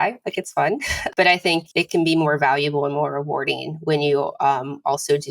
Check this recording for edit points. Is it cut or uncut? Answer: cut